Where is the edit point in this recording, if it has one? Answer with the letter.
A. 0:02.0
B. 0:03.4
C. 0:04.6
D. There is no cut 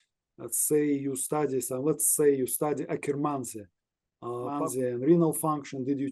C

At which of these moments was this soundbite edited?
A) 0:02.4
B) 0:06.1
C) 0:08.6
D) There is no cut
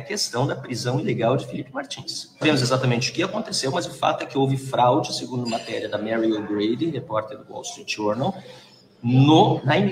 A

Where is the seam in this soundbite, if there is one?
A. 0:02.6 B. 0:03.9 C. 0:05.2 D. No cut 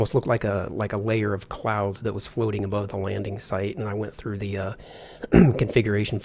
D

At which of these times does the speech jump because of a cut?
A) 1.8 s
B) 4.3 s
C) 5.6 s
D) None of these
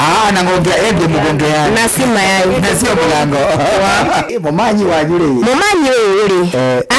B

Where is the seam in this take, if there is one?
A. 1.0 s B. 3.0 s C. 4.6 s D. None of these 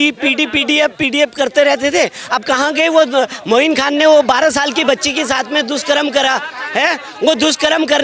D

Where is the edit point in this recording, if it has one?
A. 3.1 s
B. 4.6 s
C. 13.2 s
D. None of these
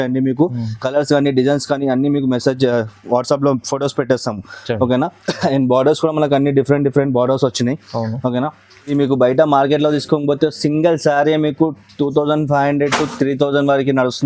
D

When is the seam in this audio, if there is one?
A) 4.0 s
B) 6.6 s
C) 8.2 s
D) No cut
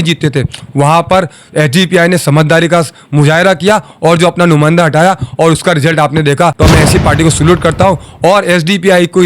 B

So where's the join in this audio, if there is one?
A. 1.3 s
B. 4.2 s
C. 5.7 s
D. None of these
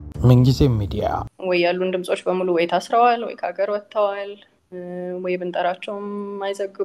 A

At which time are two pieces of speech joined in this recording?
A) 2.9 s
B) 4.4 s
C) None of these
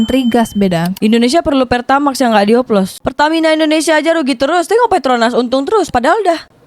A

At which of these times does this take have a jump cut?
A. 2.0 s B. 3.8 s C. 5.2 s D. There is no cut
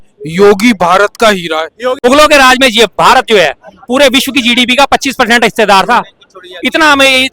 A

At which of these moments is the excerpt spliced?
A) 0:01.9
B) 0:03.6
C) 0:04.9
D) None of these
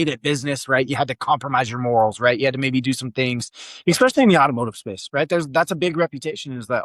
D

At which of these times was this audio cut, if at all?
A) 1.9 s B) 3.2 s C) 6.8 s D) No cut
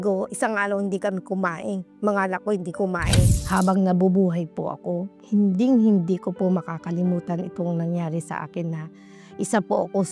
B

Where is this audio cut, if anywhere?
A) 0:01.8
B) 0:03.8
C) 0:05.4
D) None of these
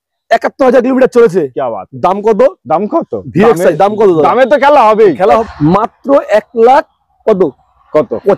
C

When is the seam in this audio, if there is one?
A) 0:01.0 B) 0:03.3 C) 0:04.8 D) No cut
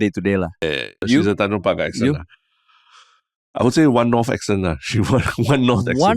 A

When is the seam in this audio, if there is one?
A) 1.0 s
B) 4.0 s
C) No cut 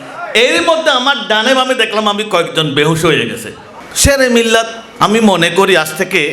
C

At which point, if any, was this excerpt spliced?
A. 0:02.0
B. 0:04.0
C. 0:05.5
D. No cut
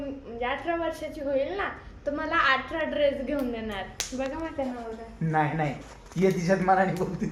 D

